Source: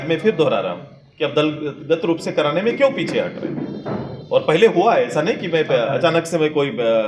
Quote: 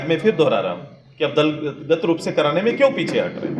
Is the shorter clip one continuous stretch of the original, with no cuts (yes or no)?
yes